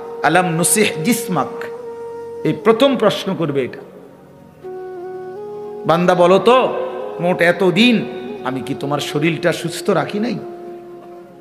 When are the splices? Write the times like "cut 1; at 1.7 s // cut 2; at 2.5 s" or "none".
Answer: cut 1; at 10.5 s